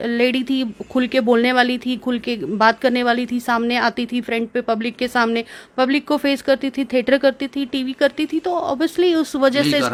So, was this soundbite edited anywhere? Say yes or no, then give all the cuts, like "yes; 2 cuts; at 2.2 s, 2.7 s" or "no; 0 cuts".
no; 0 cuts